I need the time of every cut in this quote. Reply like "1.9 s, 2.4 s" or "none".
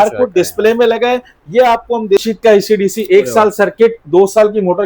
2.2 s

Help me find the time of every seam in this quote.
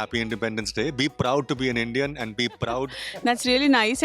3.0 s

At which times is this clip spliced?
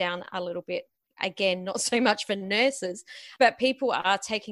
3.3 s

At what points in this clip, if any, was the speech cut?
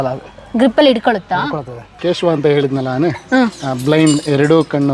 1.9 s

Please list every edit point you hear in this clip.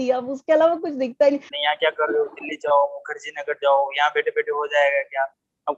1.5 s

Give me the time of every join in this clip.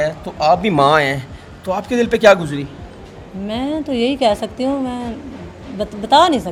none

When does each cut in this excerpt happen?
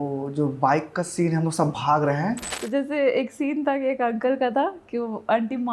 2.5 s

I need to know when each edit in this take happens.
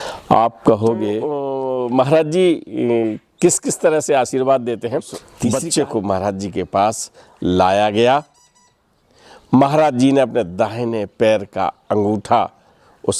1.5 s, 5.2 s

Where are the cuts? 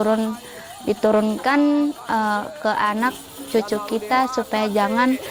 none

